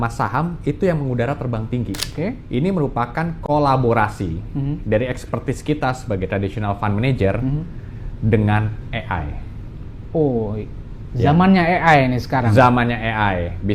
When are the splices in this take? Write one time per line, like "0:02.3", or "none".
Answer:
0:02.1